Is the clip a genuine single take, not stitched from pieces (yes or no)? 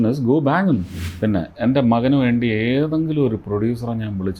no